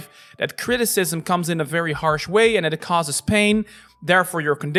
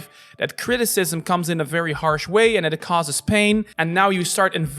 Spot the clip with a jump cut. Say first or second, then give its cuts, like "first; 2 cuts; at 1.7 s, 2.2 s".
second; 1 cut; at 3.7 s